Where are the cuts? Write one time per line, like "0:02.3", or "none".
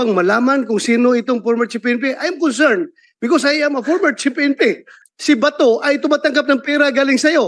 0:04.9